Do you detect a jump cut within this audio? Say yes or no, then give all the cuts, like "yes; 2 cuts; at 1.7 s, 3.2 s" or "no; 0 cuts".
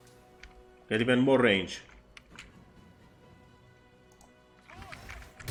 no; 0 cuts